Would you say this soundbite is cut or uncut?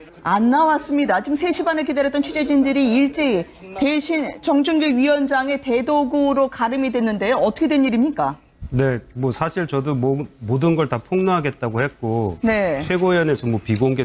cut